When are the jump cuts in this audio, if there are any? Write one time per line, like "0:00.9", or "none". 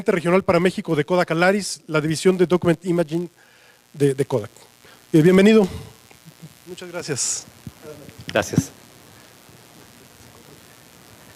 0:08.7